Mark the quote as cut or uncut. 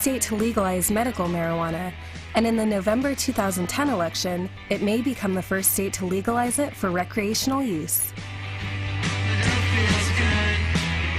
cut